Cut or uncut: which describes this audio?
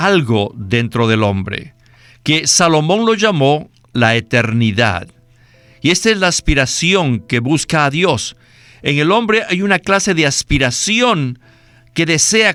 uncut